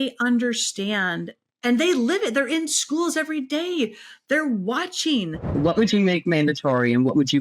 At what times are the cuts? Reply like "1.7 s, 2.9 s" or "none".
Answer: 5.5 s